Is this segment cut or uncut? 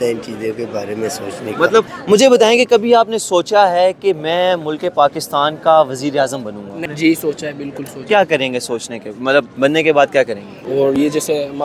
cut